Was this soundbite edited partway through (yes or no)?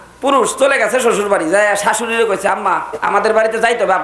yes